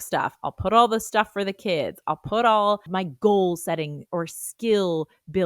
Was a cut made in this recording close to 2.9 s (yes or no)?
yes